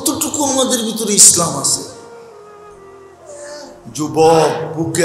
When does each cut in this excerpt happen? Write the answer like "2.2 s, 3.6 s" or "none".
1.9 s, 3.3 s